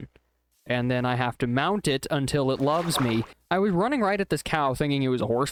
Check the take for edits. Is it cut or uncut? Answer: uncut